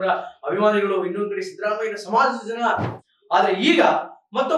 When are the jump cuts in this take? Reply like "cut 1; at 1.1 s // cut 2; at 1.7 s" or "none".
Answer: cut 1; at 3.0 s